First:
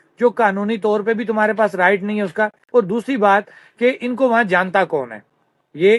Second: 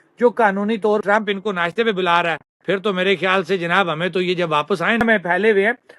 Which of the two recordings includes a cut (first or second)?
second